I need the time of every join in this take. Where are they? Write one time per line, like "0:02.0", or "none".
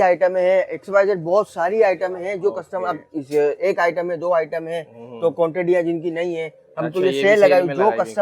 none